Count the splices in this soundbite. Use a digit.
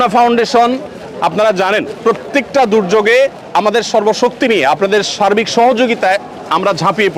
0